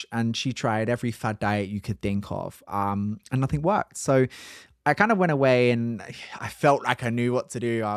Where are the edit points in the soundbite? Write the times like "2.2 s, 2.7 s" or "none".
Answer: none